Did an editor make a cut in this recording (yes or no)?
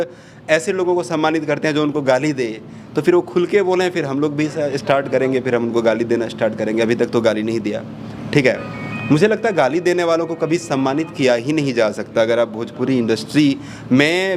no